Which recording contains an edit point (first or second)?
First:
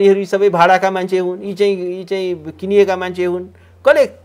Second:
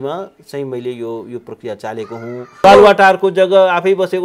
second